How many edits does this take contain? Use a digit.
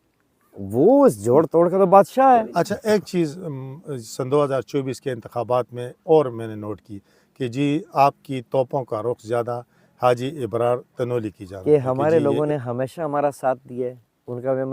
2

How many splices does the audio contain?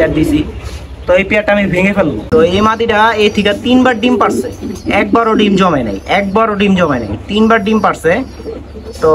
1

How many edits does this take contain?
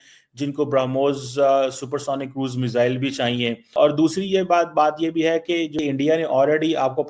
2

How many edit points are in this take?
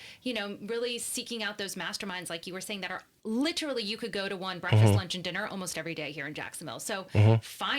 1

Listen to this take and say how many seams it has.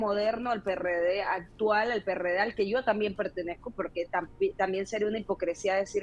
0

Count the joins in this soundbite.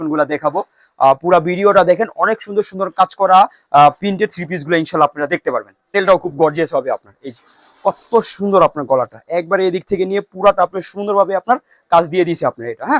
1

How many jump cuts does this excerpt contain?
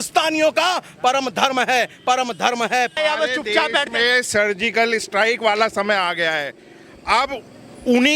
1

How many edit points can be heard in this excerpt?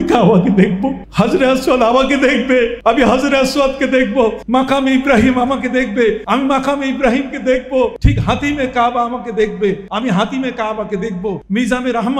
7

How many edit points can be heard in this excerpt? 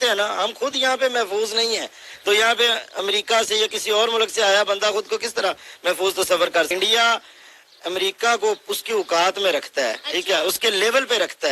1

